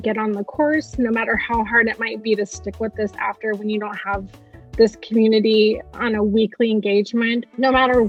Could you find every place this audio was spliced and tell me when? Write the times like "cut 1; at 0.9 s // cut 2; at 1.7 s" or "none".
none